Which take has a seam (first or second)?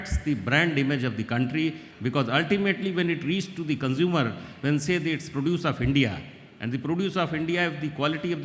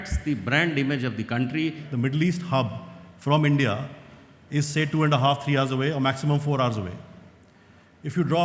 second